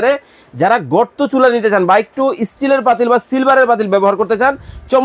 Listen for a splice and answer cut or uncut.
uncut